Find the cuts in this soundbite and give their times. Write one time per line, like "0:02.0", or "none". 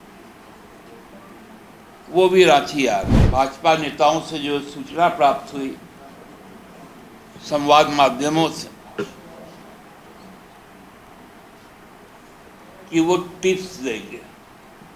0:03.2